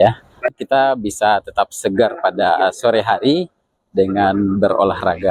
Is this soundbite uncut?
yes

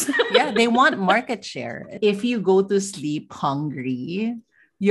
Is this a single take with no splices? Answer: no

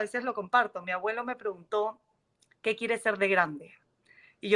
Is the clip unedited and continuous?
yes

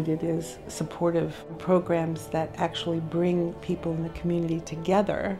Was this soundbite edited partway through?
yes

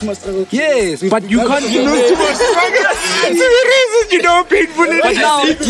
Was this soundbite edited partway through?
no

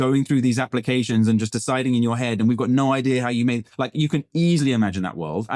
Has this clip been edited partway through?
no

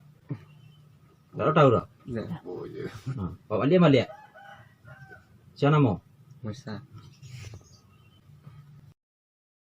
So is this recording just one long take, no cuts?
yes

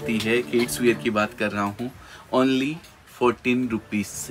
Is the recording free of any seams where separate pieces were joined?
yes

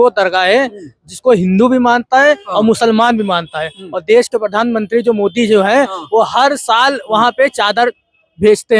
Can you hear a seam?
no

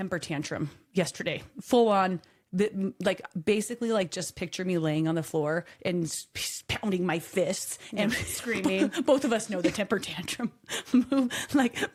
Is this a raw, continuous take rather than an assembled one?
yes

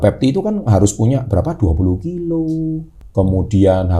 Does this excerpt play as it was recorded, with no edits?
no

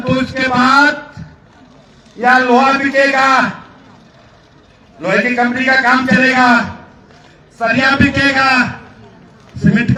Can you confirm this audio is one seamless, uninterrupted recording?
yes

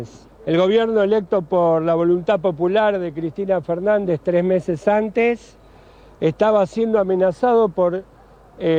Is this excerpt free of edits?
yes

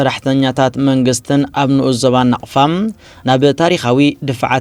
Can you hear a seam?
no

